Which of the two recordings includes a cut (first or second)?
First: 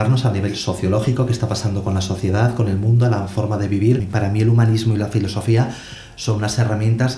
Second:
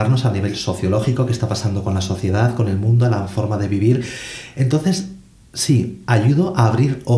first